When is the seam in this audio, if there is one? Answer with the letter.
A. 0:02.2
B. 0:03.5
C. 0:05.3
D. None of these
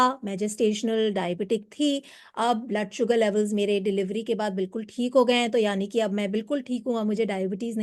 D